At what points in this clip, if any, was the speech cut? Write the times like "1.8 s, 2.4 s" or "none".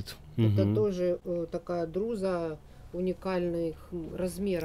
none